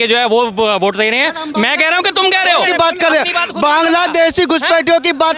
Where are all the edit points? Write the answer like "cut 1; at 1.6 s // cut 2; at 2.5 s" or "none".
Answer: none